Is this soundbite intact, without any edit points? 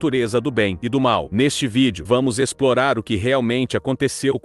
no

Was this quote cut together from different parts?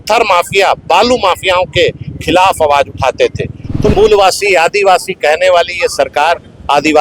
yes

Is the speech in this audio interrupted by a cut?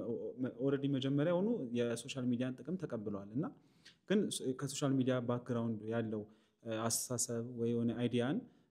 no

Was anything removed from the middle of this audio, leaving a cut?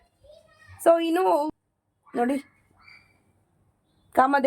yes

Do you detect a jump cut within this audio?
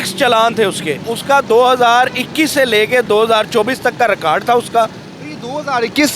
yes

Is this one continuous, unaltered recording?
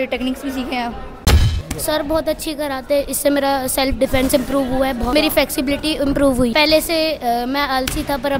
no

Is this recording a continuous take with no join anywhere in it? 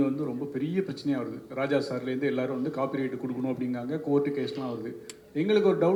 yes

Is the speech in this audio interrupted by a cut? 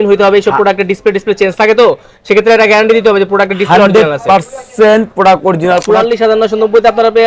yes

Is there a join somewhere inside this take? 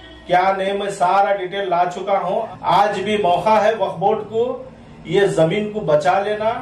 yes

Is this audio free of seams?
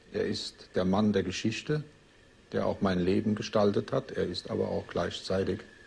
yes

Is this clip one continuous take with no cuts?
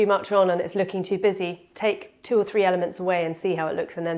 yes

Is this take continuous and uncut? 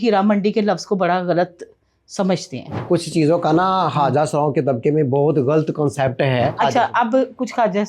no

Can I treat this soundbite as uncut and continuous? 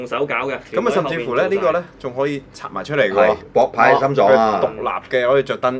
yes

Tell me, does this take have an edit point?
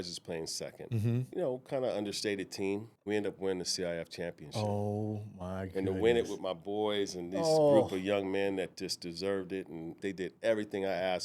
yes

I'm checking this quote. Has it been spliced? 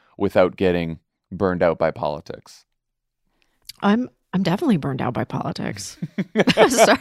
no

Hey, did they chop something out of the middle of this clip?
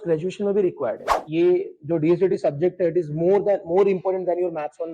yes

